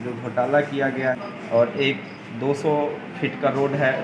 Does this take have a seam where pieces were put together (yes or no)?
yes